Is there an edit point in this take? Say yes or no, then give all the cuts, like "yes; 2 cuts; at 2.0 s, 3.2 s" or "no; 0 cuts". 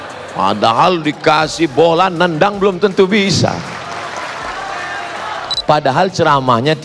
yes; 1 cut; at 5.6 s